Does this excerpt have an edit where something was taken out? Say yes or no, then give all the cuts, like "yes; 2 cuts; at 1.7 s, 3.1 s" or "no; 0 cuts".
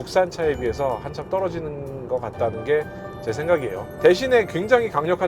yes; 1 cut; at 3.9 s